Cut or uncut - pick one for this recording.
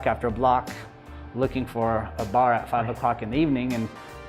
uncut